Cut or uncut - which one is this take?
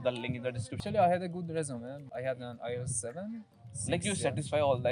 cut